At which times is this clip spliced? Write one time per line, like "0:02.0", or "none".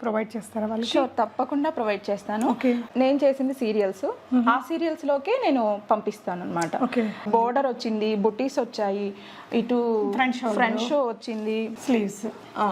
0:02.9
0:07.2
0:11.8